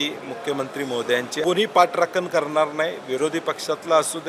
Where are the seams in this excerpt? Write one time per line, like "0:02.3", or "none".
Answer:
0:01.4